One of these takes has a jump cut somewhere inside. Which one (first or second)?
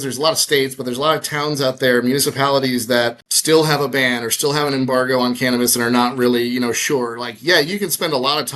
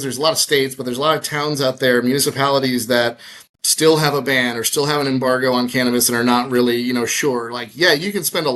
first